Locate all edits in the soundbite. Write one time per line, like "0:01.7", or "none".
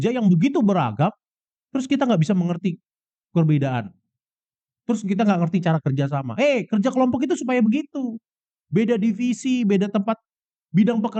none

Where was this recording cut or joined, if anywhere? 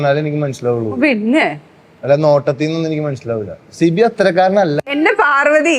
0:04.8

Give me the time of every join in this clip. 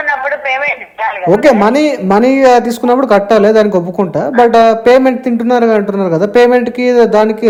none

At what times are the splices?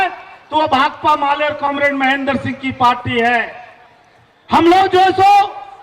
none

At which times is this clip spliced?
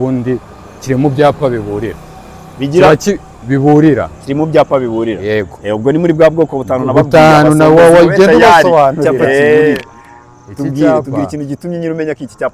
0:09.8

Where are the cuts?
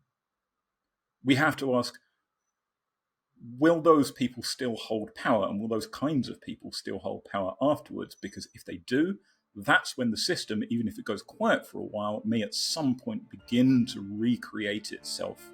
none

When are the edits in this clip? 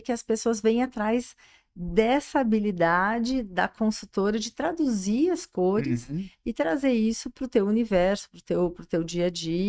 none

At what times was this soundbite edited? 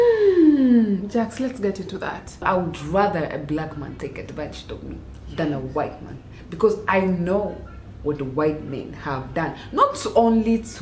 0:02.4

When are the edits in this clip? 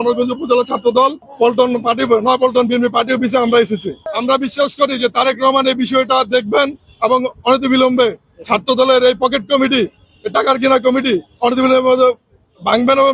0:01.2
0:04.1

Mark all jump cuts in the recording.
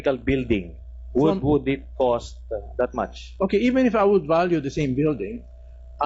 none

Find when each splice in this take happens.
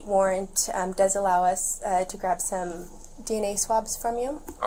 none

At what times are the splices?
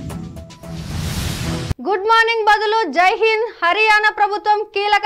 0:01.7

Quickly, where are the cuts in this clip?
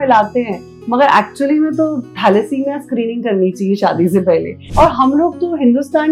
0:04.6

